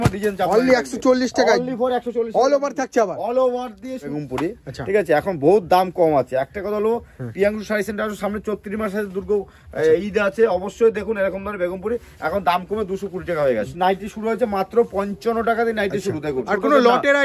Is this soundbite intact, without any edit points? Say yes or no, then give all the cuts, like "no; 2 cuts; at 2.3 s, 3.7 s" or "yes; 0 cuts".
no; 3 cuts; at 4.1 s, 13.7 s, 16.4 s